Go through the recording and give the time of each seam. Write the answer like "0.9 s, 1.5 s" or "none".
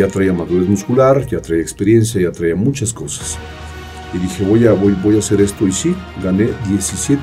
none